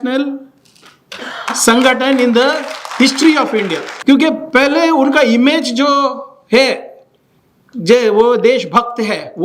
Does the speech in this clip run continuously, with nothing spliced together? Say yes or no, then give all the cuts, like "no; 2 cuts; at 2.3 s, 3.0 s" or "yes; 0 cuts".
no; 1 cut; at 3.9 s